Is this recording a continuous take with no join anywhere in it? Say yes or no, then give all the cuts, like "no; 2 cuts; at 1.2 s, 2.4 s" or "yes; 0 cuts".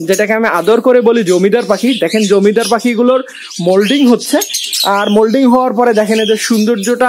yes; 0 cuts